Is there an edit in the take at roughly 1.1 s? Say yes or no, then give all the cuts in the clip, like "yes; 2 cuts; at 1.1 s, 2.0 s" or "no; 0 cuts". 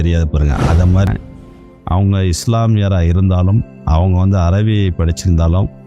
yes; 1 cut; at 1.1 s